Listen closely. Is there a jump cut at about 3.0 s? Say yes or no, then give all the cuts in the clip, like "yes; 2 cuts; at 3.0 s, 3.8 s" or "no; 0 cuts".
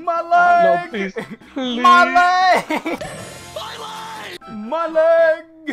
yes; 1 cut; at 3.0 s